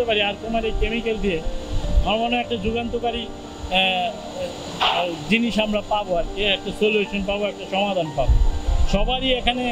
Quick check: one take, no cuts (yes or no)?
yes